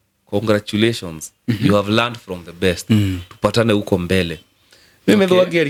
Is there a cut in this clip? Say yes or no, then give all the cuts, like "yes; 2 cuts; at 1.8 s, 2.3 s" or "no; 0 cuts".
no; 0 cuts